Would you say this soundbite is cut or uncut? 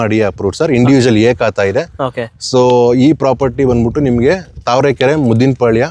uncut